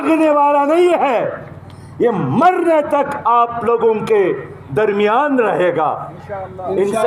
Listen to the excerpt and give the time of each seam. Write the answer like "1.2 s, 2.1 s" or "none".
none